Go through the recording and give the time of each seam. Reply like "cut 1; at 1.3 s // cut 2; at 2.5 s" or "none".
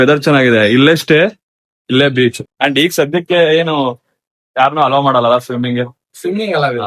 cut 1; at 2.5 s